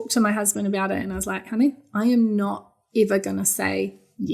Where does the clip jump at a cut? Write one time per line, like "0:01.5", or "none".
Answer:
none